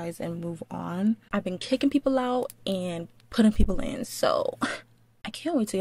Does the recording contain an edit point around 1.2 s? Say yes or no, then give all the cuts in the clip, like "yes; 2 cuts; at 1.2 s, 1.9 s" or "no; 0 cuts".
no; 0 cuts